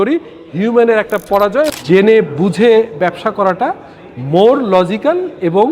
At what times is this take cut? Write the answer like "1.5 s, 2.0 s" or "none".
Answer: 1.7 s